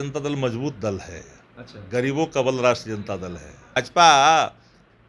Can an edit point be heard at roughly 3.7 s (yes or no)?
yes